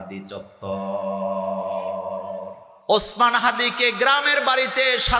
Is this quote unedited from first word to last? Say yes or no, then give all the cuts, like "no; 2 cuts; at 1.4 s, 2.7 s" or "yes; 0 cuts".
no; 1 cut; at 2.7 s